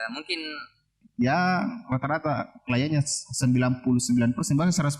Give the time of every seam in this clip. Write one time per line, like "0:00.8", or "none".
0:01.0